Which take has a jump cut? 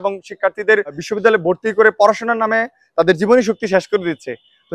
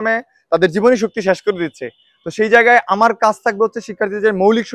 first; 1 cut; at 1.0 s

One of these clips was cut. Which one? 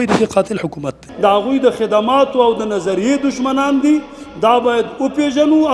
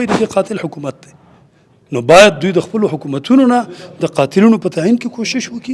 first; 1 cut; at 1.0 s

